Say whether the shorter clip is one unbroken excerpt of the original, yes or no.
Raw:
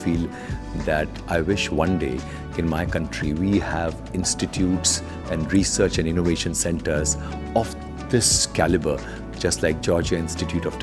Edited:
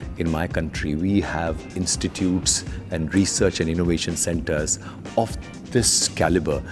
yes